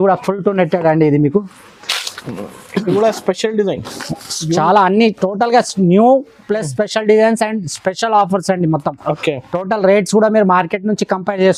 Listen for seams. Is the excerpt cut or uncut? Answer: uncut